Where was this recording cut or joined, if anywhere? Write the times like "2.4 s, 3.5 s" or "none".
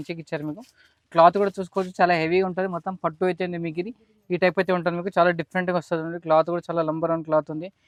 none